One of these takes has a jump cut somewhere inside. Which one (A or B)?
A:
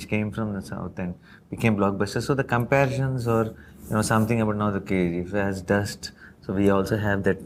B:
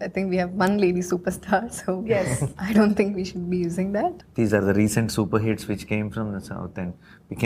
B